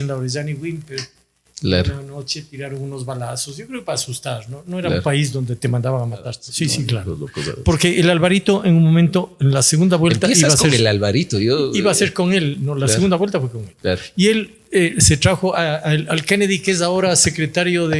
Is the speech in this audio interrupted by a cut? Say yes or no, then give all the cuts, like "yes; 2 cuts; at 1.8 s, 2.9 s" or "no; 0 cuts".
yes; 1 cut; at 6.4 s